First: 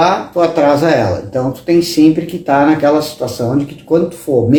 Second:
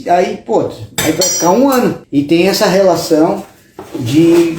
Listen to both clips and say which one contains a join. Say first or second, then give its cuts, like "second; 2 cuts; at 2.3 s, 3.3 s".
second; 1 cut; at 2.0 s